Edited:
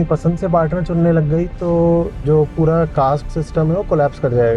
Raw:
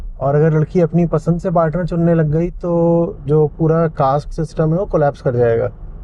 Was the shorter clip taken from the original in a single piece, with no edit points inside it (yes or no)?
yes